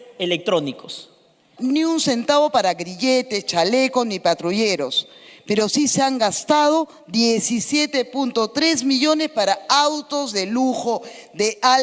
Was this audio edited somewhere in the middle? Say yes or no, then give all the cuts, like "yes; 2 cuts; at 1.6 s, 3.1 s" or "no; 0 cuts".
yes; 1 cut; at 1.4 s